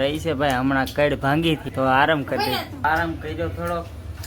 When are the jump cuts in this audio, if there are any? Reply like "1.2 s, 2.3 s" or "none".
1.7 s, 2.8 s